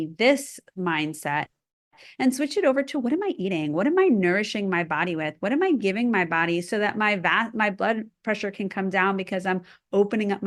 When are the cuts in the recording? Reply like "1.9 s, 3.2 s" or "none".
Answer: none